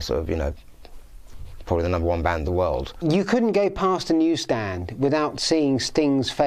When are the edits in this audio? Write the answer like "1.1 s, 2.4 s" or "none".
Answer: 2.9 s